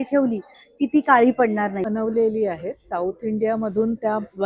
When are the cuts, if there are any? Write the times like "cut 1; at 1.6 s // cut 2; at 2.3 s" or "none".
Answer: cut 1; at 1.8 s